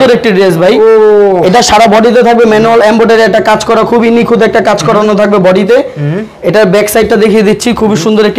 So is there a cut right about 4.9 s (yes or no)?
no